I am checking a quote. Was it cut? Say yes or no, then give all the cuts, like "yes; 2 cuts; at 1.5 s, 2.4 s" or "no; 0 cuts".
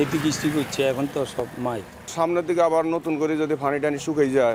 no; 0 cuts